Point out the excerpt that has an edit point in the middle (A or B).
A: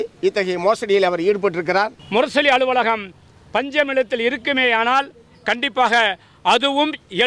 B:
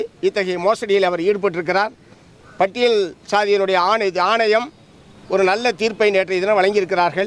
A